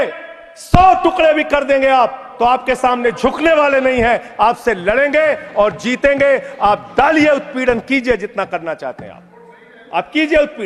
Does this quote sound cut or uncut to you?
uncut